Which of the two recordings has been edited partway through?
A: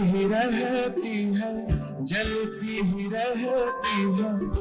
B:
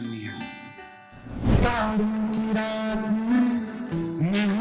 B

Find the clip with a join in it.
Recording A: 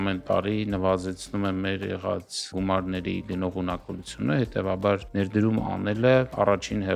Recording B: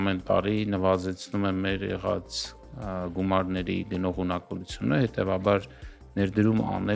A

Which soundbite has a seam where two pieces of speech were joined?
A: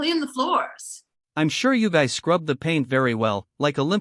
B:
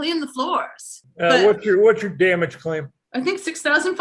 B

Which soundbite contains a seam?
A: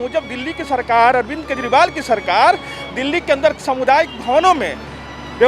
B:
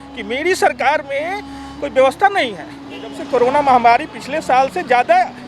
B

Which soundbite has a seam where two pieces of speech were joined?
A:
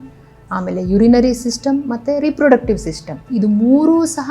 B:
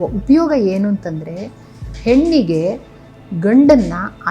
A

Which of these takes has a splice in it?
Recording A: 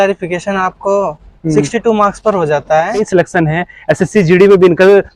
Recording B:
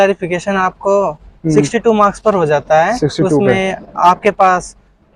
A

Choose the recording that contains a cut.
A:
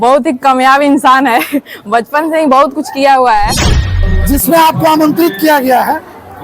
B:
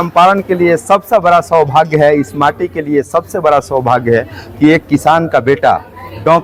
A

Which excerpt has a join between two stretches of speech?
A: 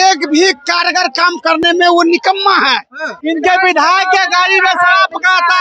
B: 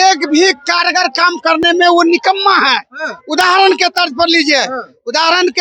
A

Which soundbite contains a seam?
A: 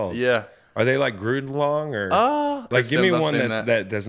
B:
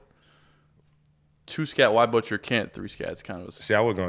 A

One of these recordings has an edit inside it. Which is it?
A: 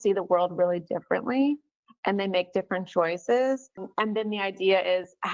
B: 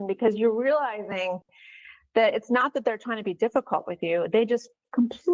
A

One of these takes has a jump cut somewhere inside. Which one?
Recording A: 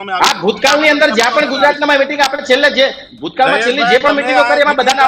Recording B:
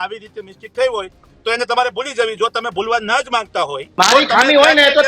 B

